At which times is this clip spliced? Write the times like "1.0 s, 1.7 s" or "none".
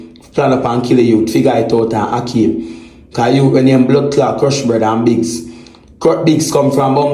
none